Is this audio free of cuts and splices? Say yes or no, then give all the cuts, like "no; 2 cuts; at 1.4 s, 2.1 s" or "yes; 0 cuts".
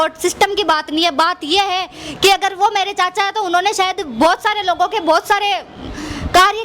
yes; 0 cuts